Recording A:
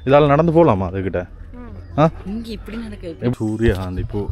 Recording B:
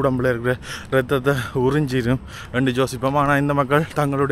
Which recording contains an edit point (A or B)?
A